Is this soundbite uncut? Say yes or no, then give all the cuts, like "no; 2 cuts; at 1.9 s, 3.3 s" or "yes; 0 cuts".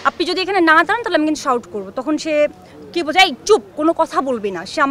yes; 0 cuts